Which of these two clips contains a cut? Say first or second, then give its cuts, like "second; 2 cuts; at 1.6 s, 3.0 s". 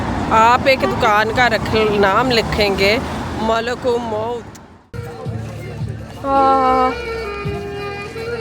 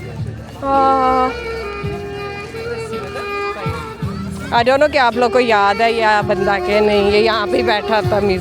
first; 1 cut; at 4.7 s